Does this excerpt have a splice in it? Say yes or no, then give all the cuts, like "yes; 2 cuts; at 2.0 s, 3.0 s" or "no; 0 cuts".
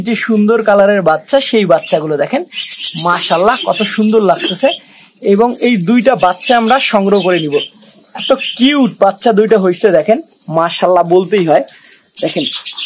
no; 0 cuts